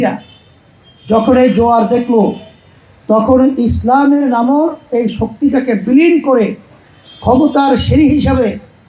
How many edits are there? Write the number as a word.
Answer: one